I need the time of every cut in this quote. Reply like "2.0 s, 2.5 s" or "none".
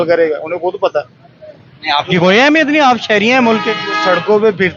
none